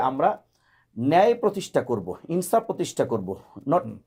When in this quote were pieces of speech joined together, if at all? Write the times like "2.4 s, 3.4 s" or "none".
none